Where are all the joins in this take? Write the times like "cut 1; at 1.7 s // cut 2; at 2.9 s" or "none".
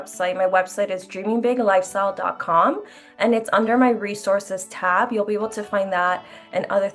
none